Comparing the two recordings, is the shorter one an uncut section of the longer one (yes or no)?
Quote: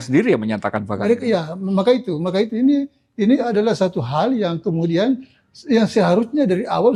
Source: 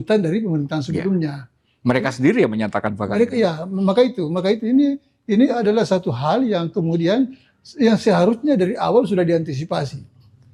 yes